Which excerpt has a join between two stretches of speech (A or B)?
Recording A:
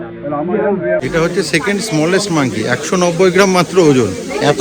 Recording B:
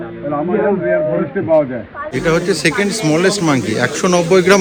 A